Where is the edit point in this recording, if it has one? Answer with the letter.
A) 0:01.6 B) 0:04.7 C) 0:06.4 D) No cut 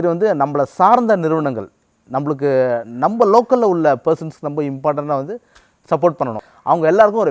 C